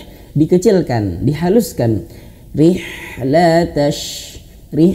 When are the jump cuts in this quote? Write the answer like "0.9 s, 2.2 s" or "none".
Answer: none